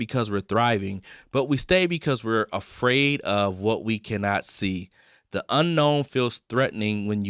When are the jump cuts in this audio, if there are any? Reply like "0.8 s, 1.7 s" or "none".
none